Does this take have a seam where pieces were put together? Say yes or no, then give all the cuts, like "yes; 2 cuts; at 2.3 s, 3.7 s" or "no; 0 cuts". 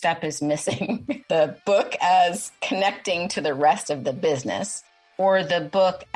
yes; 2 cuts; at 1.2 s, 2.1 s